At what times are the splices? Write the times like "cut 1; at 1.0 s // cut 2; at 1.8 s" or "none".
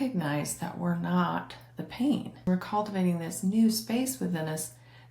cut 1; at 2.5 s